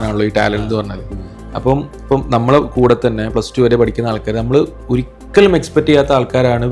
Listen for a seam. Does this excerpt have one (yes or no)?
no